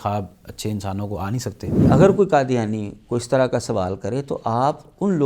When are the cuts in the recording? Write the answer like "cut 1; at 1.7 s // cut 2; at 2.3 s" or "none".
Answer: cut 1; at 1.9 s